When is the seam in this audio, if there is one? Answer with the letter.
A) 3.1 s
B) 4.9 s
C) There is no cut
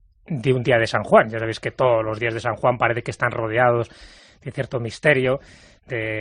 A